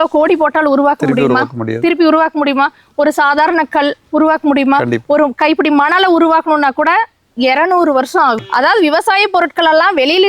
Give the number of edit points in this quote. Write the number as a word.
one